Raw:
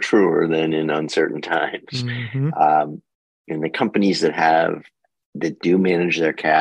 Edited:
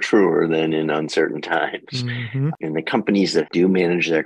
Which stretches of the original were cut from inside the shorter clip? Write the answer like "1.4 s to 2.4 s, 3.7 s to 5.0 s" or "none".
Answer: 2.5 s to 3.4 s, 4.3 s to 5.6 s